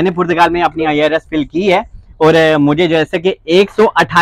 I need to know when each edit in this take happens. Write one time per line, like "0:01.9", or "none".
none